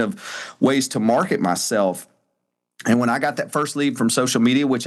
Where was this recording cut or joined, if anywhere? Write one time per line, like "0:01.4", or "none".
none